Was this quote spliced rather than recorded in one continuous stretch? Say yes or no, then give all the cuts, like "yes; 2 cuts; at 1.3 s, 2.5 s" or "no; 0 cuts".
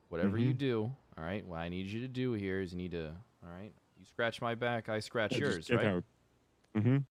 no; 0 cuts